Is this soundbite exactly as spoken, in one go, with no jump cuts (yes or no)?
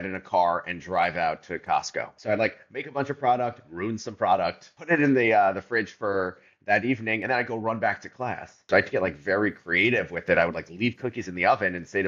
no